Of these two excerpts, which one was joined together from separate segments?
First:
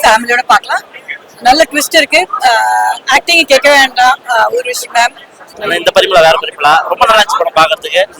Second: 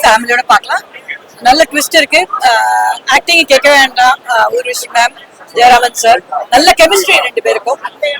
first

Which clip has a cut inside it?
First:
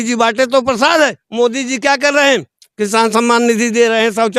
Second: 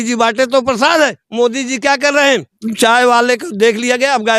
second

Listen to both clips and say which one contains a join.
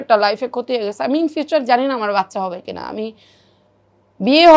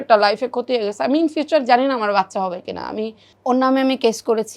second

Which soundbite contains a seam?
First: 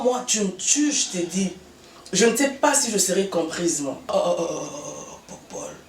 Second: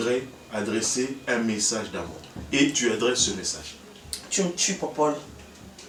first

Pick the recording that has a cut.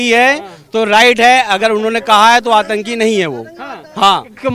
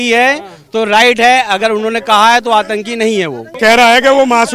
second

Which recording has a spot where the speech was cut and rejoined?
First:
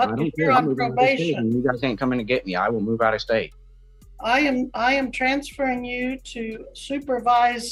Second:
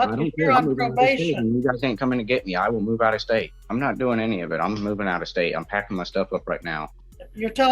second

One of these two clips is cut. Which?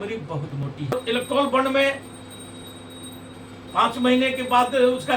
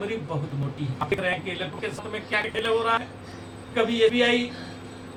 first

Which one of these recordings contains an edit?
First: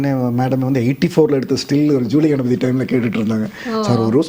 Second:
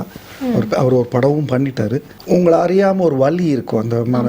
second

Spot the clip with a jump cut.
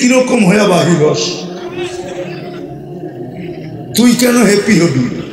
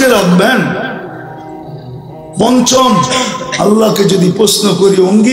first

